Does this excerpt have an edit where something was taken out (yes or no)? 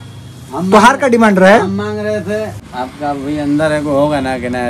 yes